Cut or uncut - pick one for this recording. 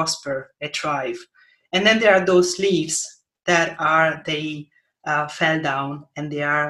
uncut